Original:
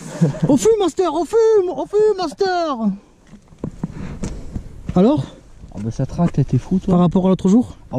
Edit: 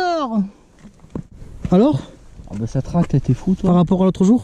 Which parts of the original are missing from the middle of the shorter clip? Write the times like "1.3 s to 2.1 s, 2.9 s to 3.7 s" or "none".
3.7 s to 4.5 s